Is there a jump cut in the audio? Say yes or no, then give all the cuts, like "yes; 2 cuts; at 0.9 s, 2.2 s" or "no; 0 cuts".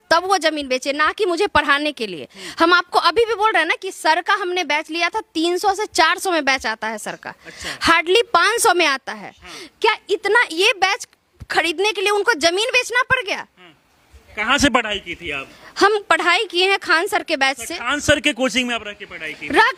no; 0 cuts